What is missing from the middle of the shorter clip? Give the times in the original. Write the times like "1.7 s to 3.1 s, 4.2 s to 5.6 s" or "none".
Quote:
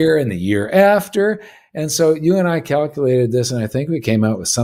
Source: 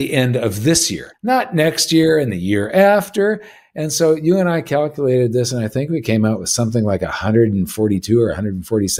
none